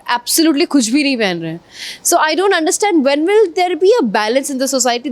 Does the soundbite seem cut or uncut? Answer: uncut